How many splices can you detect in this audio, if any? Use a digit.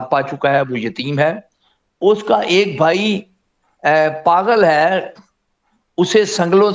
0